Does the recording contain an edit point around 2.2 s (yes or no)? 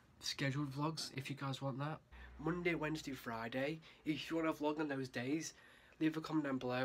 yes